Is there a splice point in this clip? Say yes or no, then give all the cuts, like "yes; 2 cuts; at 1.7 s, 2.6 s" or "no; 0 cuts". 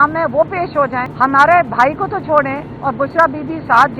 yes; 1 cut; at 1.1 s